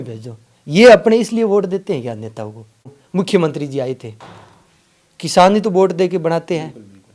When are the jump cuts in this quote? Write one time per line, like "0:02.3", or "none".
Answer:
0:03.0